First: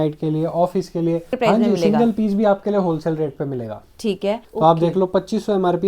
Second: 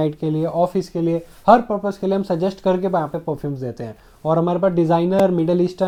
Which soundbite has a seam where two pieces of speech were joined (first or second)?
first